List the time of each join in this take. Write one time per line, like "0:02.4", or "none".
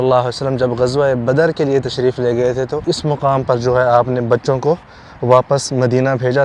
0:02.8